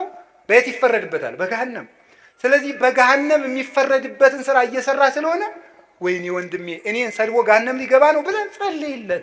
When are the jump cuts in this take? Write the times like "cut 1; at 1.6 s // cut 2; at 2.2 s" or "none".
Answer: none